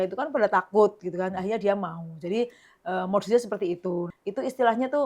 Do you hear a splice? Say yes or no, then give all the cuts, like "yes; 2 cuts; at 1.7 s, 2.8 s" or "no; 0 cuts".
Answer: yes; 1 cut; at 4.1 s